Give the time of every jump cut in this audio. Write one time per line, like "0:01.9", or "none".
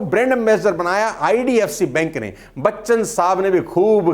none